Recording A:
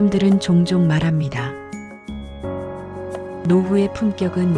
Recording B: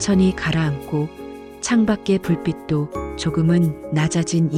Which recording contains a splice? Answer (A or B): A